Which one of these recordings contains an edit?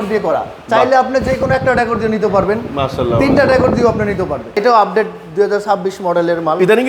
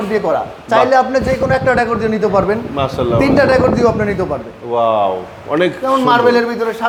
first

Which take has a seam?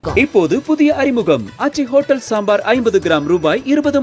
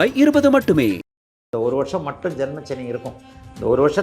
second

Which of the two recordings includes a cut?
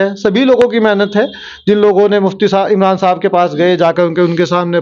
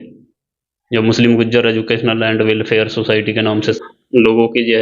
second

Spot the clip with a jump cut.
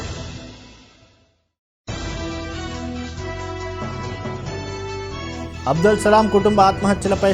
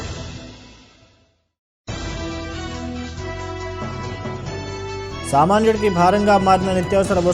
first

